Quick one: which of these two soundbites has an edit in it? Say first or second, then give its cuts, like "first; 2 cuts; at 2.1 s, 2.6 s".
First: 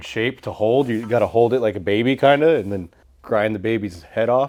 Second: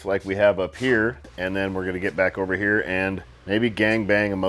second; 2 cuts; at 1.2 s, 3.3 s